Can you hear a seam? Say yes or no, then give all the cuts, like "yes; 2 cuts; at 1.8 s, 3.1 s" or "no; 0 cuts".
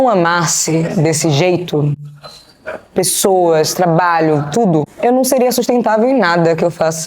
yes; 1 cut; at 4.9 s